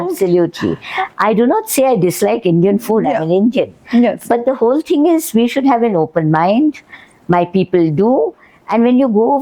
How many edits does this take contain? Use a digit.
0